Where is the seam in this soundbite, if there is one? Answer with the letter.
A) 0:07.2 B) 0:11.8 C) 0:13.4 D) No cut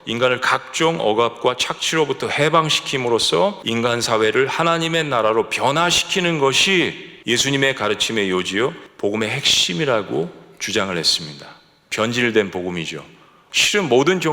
C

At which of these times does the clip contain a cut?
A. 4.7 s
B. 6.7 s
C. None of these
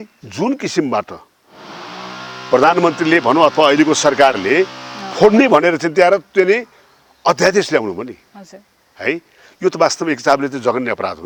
C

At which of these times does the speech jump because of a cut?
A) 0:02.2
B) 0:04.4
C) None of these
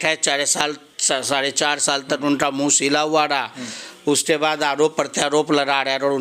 C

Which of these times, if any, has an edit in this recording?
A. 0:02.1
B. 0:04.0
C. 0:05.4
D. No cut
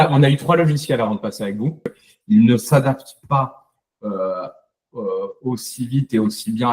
A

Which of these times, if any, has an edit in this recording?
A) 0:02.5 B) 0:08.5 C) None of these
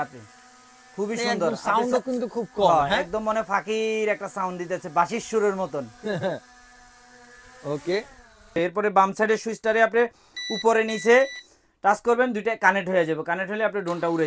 B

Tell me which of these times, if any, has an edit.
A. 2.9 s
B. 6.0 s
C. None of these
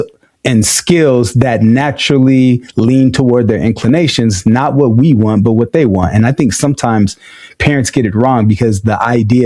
C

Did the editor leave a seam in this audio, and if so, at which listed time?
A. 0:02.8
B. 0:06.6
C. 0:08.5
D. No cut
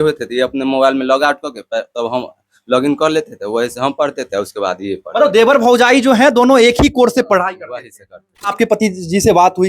C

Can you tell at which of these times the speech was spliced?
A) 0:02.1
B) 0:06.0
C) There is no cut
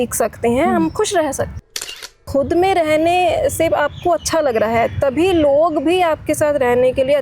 A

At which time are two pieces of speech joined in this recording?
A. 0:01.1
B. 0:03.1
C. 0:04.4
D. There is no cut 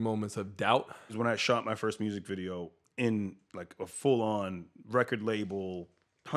A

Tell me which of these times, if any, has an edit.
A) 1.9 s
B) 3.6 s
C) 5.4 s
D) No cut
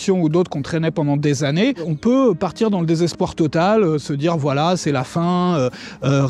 A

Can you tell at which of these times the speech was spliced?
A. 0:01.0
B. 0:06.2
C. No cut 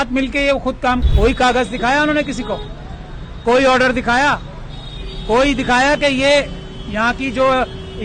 A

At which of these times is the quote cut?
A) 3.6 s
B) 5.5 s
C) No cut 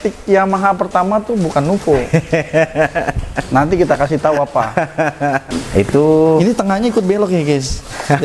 B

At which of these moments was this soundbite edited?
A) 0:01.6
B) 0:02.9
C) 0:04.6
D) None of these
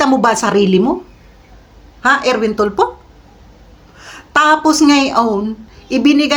D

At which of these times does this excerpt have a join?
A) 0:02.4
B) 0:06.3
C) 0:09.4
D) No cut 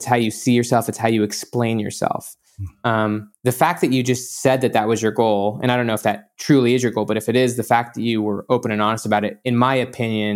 D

